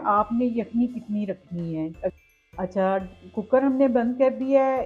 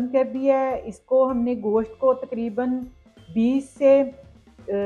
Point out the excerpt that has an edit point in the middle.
first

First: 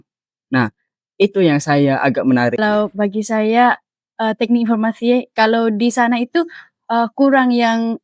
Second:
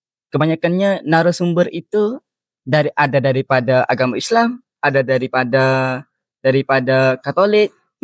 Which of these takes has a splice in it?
first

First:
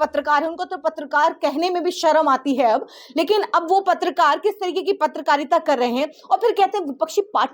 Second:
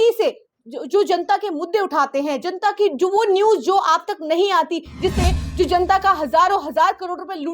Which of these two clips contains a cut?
second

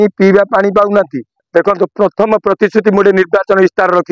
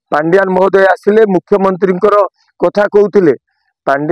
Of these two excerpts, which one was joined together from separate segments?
first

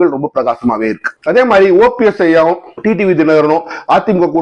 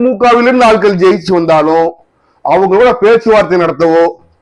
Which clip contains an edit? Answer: first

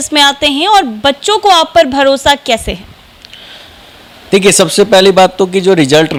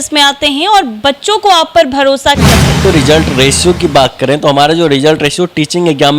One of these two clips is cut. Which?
second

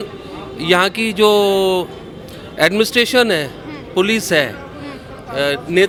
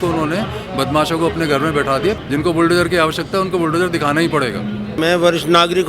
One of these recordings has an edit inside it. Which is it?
second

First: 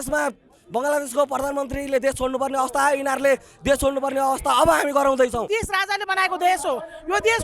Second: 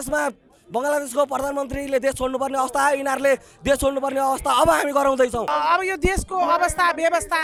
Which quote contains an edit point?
first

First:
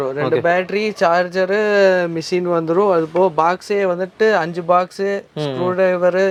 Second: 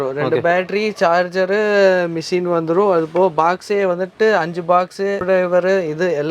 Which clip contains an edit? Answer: second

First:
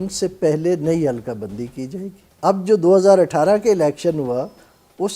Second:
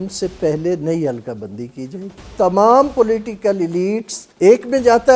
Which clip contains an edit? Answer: second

